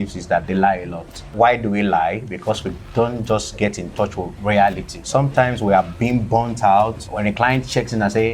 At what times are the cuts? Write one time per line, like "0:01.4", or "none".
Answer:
0:01.2
0:05.0
0:07.0